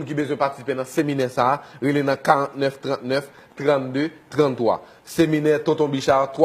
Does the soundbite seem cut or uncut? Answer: uncut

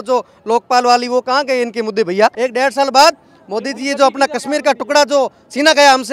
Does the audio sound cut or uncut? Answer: cut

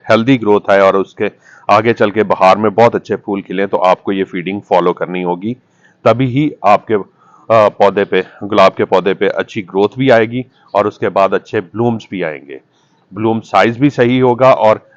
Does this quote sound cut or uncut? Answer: uncut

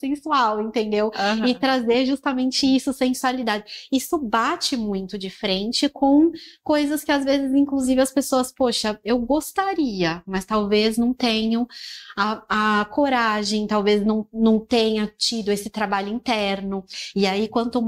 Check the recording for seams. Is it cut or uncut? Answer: cut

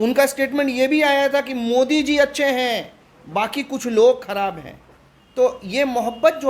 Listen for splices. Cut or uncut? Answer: uncut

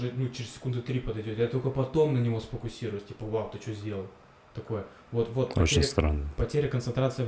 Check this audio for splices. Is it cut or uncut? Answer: uncut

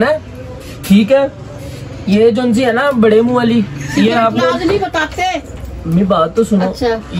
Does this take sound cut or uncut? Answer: cut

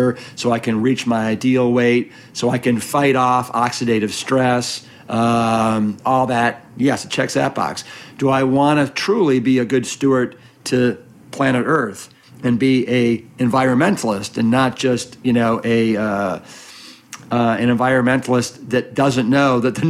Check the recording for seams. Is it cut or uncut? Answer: uncut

